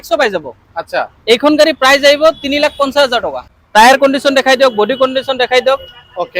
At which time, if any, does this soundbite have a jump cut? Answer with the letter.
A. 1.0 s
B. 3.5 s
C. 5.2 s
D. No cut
B